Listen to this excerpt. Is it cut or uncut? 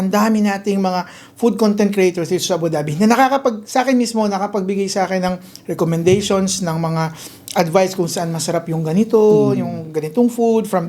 uncut